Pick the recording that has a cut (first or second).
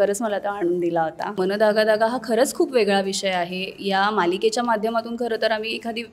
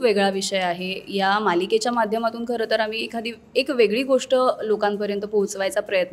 first